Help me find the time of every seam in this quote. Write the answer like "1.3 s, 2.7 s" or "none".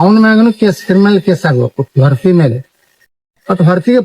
1.4 s